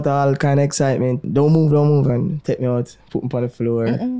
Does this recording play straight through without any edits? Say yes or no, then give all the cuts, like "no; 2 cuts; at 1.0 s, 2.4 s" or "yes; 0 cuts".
no; 1 cut; at 1.3 s